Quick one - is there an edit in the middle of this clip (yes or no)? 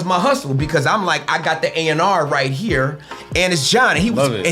yes